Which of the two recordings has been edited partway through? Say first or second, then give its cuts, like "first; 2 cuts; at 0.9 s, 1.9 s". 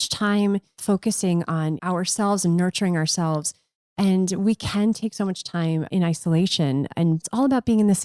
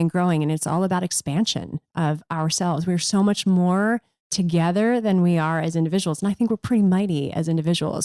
first; 4 cuts; at 0.8 s, 1.8 s, 5.9 s, 7.3 s